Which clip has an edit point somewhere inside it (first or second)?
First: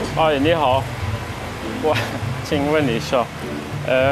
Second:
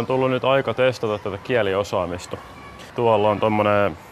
second